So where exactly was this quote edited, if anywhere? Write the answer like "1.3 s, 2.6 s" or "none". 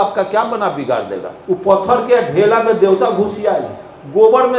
1.3 s